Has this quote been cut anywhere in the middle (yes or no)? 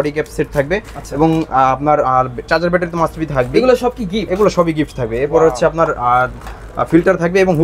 no